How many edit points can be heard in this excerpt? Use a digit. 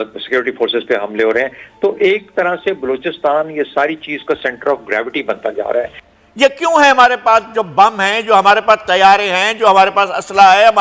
1